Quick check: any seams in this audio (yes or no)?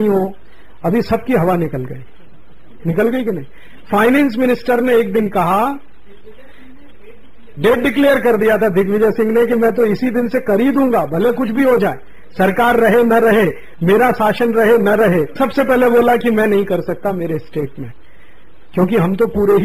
no